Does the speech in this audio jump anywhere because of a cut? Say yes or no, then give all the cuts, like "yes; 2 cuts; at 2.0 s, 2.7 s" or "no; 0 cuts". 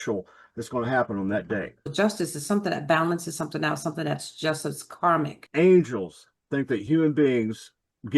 yes; 2 cuts; at 1.9 s, 5.4 s